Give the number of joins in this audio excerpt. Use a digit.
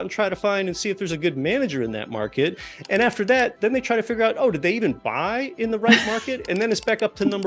1